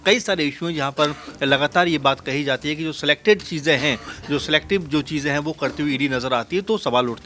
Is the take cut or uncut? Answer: uncut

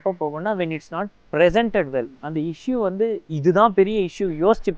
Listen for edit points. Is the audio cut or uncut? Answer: cut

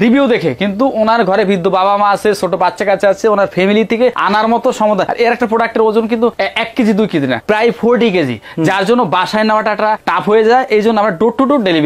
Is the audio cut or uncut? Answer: uncut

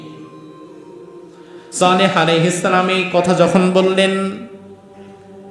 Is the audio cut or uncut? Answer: cut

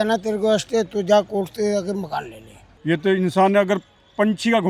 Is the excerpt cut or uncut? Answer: cut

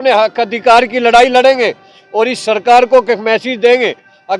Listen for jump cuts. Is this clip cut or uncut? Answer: uncut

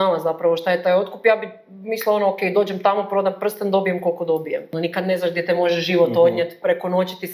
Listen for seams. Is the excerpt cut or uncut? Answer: cut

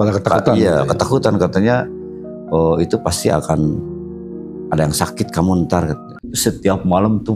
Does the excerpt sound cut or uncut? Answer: cut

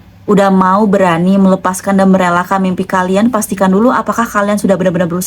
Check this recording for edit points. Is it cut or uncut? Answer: uncut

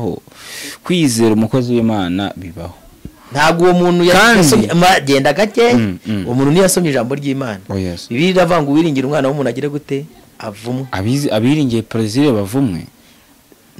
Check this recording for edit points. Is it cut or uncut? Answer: uncut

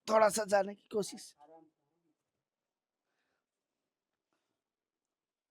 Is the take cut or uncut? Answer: uncut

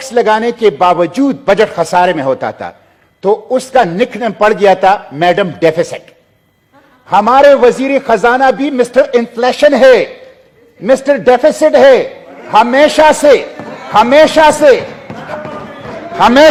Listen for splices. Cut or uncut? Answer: uncut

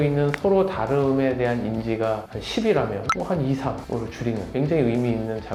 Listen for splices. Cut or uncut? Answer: uncut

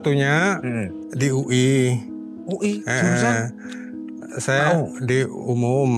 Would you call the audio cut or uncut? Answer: cut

